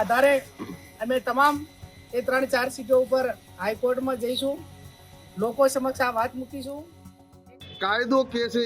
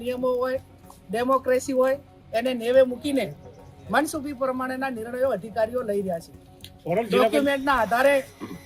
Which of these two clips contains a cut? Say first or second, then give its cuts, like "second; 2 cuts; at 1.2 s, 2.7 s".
first; 1 cut; at 7.5 s